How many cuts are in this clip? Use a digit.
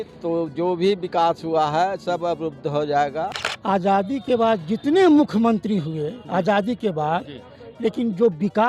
1